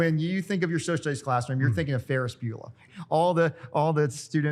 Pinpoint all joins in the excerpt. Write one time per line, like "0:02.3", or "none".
0:02.8